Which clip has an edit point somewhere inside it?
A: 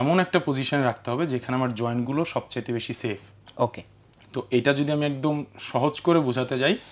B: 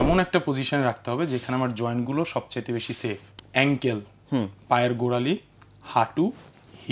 B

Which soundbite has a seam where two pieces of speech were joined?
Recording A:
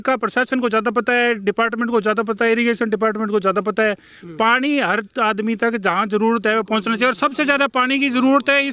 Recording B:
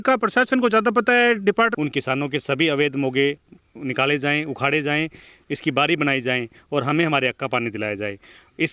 B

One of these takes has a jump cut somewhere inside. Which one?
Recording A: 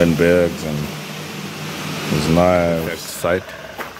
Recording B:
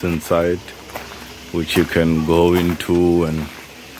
A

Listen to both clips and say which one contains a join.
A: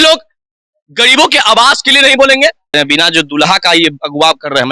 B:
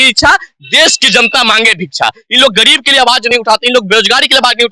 A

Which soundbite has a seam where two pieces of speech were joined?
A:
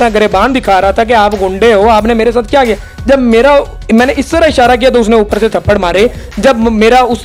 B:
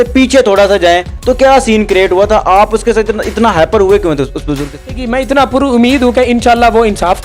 B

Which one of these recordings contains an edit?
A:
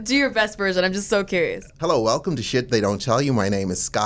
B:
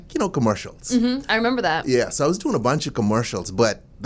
A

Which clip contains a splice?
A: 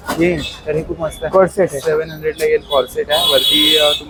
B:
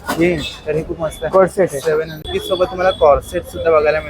B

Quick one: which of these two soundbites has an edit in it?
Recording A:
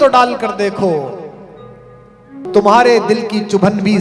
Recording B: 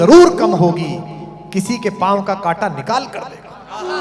A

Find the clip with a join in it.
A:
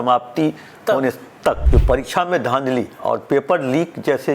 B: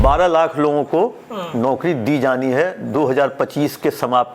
A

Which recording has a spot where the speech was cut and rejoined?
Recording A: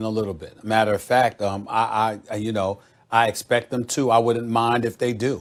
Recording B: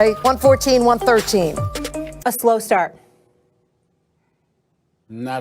B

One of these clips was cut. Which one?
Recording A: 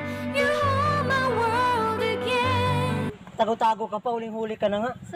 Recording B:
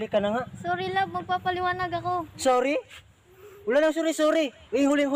A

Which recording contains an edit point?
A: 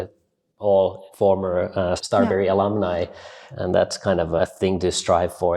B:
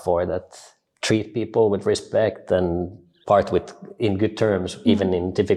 A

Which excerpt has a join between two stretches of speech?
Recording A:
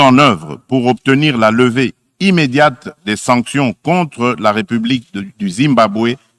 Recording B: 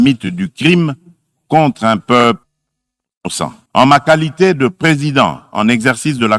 B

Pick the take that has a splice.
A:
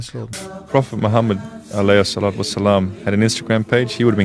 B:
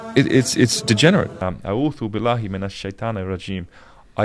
B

